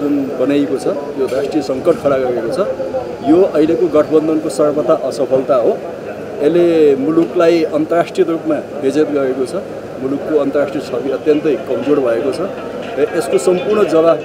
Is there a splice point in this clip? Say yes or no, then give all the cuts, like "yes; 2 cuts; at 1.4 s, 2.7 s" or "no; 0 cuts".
no; 0 cuts